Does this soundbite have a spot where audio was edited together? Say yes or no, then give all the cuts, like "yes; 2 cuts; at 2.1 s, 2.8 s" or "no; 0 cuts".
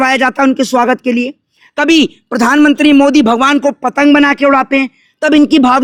no; 0 cuts